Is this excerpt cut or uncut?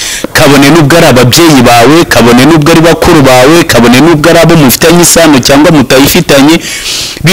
uncut